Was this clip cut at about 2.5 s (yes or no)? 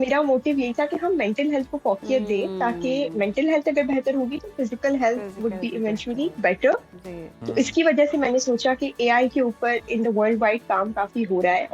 no